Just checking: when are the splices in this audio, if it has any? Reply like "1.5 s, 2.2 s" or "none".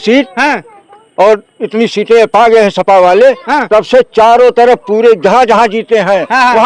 none